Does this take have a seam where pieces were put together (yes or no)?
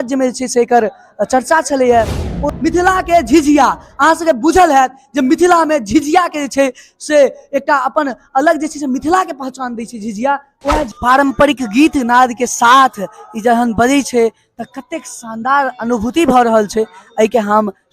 yes